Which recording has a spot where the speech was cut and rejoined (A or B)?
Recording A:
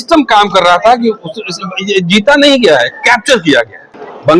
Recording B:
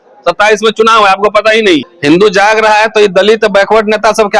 B